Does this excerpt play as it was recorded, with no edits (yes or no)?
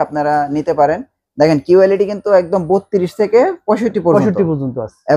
yes